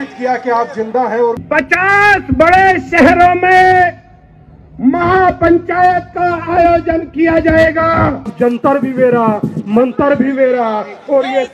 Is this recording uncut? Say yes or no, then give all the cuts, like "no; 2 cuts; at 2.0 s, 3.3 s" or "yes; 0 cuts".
no; 2 cuts; at 1.4 s, 8.3 s